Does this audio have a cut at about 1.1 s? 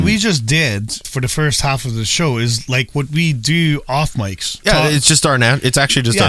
yes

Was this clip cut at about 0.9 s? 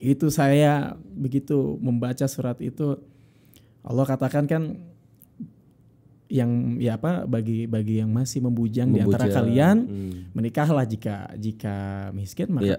no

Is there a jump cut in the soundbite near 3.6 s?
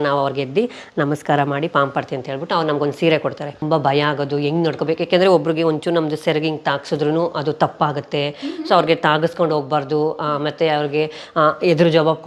yes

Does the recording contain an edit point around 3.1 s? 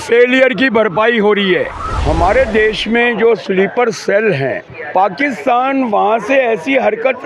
no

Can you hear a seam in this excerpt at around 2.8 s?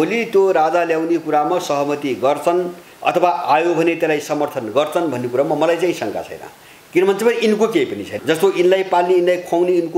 yes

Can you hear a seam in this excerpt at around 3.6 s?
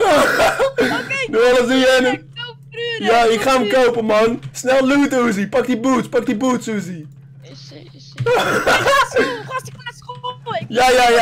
no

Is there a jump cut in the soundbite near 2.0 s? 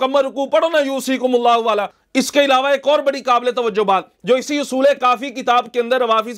yes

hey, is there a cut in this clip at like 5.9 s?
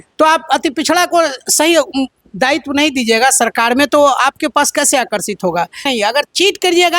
yes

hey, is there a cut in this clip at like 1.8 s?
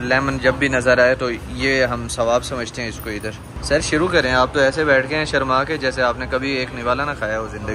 no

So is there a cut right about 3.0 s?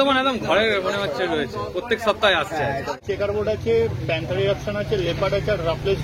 yes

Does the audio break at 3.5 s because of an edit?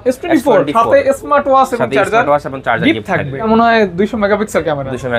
yes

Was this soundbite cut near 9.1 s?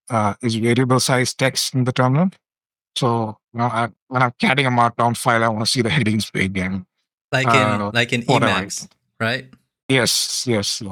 no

